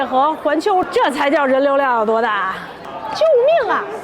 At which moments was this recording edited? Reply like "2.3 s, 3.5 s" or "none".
0.9 s, 2.8 s